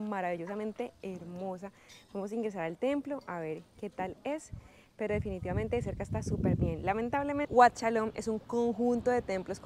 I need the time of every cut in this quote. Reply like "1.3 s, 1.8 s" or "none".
7.5 s